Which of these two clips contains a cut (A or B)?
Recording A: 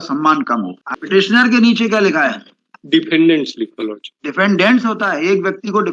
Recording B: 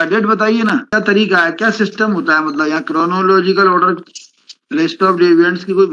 A